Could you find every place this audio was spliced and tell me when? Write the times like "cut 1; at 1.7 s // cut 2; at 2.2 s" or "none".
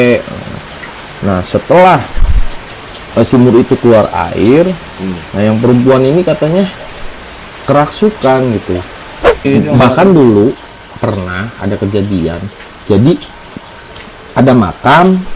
cut 1; at 9.5 s